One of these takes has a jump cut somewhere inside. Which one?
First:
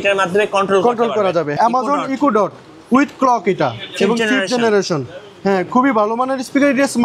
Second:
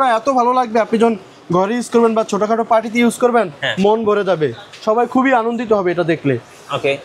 first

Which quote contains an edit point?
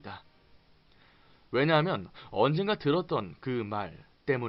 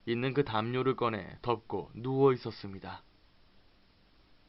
second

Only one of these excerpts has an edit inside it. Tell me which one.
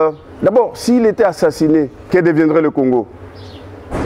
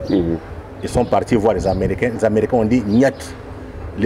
first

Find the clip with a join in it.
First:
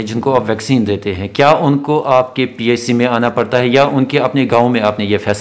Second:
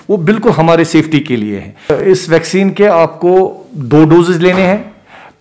second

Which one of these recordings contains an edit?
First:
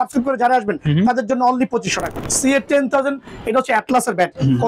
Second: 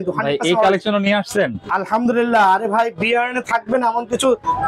first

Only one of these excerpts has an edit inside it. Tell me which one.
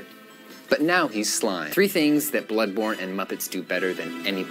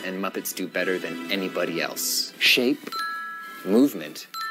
first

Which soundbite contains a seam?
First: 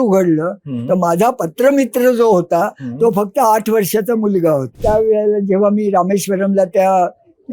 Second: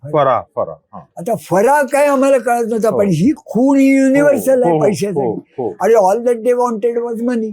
first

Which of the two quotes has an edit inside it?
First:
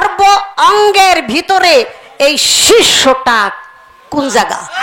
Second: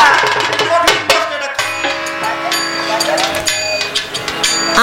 second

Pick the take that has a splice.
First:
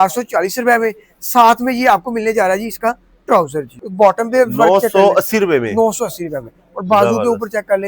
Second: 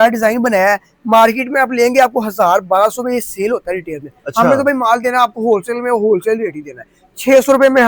first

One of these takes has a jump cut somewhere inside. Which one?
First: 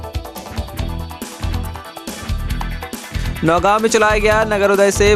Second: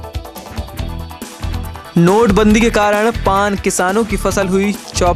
second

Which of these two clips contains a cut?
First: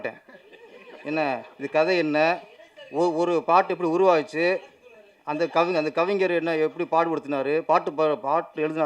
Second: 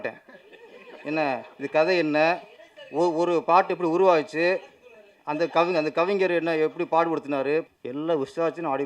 second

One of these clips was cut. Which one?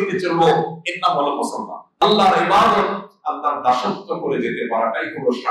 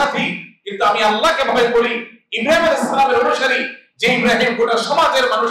first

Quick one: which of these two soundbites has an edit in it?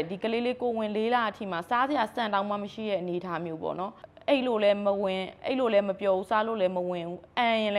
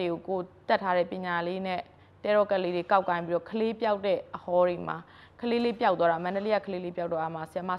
first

